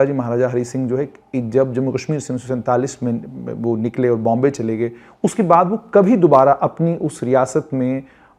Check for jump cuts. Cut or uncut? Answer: uncut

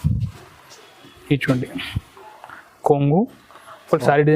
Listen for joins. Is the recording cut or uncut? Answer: uncut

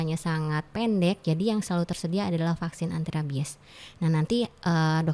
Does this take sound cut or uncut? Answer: uncut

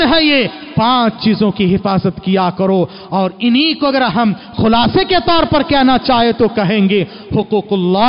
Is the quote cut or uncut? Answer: uncut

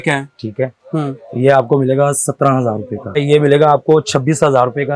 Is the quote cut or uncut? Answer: cut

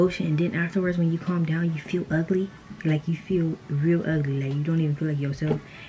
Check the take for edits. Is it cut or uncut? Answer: uncut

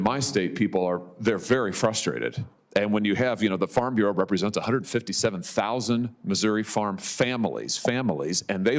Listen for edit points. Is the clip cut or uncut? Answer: uncut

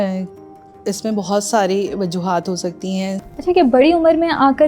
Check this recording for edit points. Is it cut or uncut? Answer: cut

